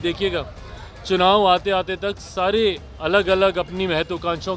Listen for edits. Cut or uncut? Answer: uncut